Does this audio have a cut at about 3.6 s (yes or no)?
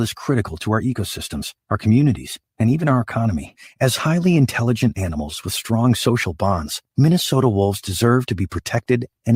no